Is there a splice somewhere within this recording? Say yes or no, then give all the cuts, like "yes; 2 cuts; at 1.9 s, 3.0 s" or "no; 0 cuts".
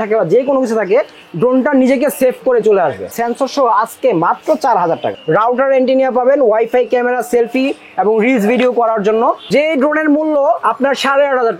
yes; 3 cuts; at 3.1 s, 5.1 s, 9.4 s